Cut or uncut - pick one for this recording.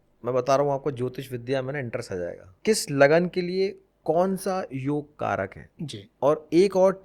cut